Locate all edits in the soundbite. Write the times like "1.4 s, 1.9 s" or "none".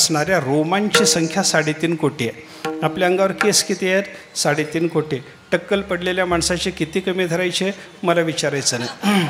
none